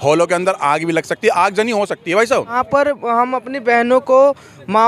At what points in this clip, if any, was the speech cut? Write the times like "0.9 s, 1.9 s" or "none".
2.6 s